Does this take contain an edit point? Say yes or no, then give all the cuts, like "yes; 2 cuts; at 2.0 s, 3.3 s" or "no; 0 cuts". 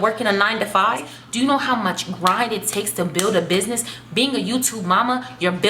yes; 1 cut; at 1.2 s